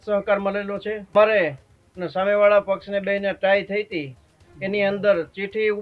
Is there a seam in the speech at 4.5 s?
no; 1 cut; at 1.1 s

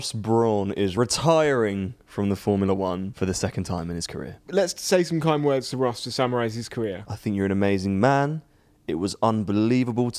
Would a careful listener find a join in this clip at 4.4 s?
yes; 4 cuts; at 0.9 s, 3.1 s, 4.4 s, 7.0 s

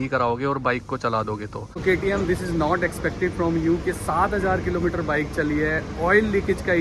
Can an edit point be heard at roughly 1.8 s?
yes; 1 cut; at 1.8 s

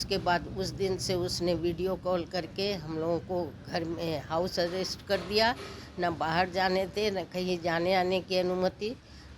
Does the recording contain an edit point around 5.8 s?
no; 0 cuts

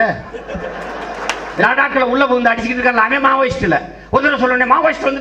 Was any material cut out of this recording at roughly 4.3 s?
no; 1 cut; at 1.6 s

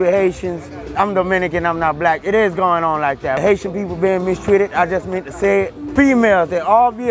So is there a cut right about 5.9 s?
yes; 3 cuts; at 0.9 s, 3.4 s, 5.9 s

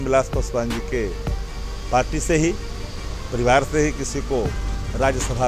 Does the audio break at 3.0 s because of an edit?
no; 0 cuts

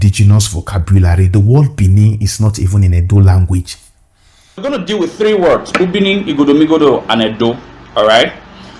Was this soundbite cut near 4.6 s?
yes; 1 cut; at 4.6 s

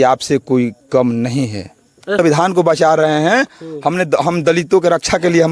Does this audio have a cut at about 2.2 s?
yes; 1 cut; at 2.2 s

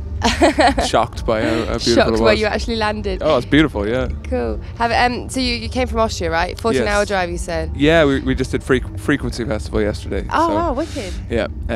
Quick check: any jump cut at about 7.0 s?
yes; 1 cut; at 7.0 s

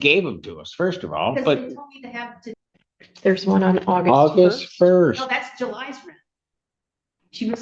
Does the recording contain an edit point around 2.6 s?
yes; 1 cut; at 2.6 s

